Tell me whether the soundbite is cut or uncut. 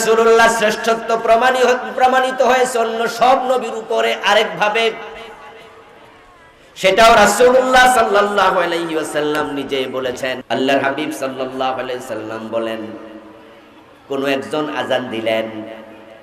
cut